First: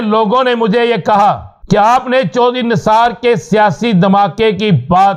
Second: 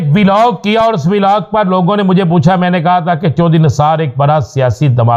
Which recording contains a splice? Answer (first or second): first